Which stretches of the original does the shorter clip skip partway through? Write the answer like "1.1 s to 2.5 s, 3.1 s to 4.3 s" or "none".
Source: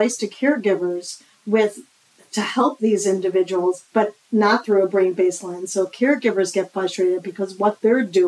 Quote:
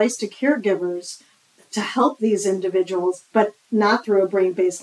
1.3 s to 1.9 s